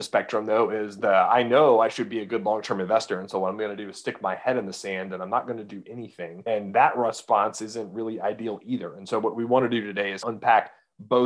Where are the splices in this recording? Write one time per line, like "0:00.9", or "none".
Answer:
0:10.2